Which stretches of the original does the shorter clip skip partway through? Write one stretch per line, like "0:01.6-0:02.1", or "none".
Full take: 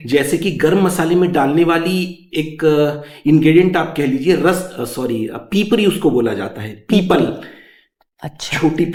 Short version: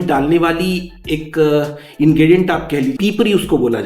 0:04.2-0:05.5